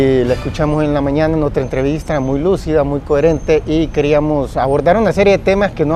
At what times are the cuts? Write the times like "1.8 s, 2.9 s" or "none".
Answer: 4.7 s